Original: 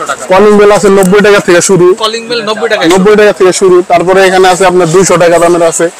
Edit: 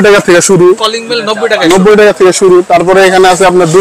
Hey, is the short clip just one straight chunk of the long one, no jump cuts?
yes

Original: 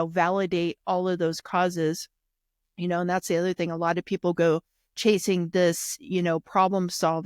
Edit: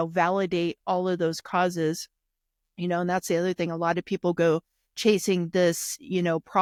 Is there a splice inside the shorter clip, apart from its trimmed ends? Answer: no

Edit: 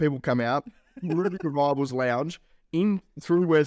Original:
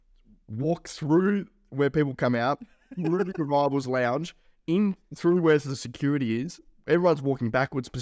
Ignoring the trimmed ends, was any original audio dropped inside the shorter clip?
no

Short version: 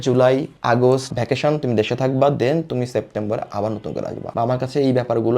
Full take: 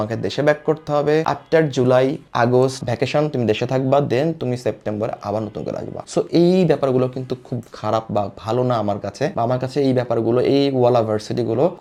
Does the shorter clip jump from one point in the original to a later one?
yes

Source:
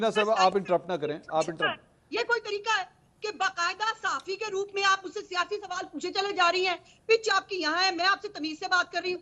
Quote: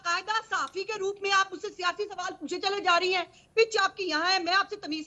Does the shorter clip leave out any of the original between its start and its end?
no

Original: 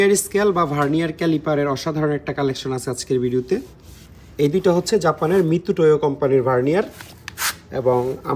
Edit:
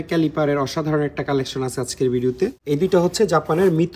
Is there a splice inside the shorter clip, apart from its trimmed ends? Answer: yes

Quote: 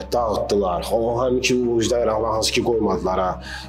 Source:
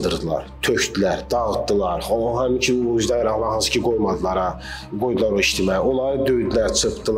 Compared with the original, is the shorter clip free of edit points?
yes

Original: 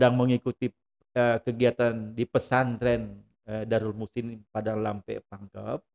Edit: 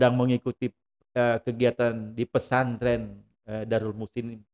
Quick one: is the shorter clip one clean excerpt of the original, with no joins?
yes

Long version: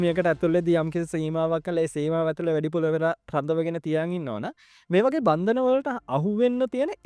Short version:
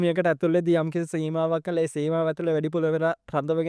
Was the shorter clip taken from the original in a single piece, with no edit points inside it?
yes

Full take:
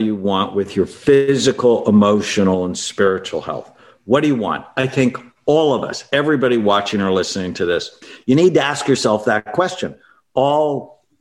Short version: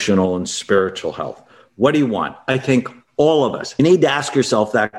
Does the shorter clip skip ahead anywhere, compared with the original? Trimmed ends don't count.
yes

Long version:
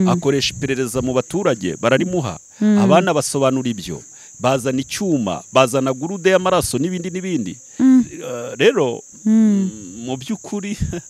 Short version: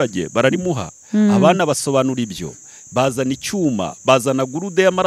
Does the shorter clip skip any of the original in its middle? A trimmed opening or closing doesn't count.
no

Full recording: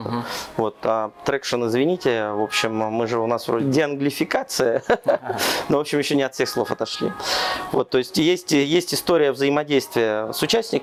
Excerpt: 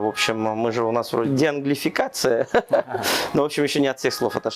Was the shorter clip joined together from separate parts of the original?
no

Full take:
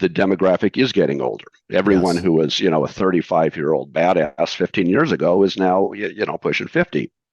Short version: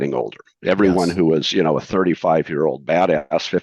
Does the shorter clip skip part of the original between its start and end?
no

